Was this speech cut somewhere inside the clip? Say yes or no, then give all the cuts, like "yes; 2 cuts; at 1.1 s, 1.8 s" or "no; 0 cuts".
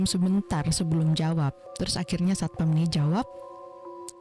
yes; 1 cut; at 1.6 s